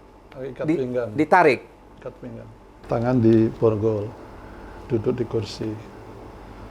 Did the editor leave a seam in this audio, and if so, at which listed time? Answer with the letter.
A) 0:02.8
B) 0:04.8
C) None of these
A